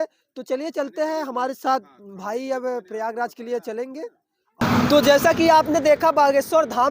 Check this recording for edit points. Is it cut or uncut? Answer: cut